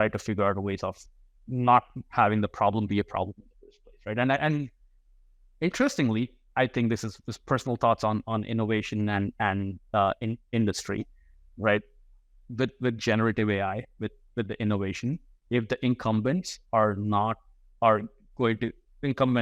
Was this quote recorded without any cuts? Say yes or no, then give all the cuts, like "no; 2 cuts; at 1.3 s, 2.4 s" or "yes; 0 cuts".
yes; 0 cuts